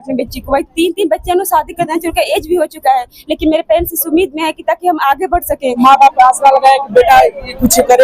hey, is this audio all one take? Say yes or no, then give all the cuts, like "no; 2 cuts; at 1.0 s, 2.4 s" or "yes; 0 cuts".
no; 1 cut; at 5.8 s